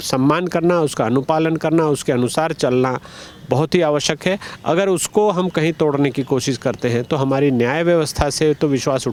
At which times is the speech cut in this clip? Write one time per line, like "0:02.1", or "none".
none